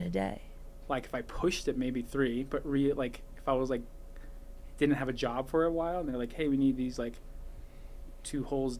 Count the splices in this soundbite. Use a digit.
0